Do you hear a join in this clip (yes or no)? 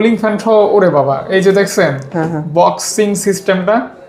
no